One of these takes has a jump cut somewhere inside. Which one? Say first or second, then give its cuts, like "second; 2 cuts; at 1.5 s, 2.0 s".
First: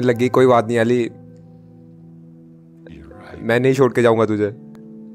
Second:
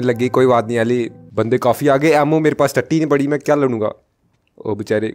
second; 1 cut; at 1.2 s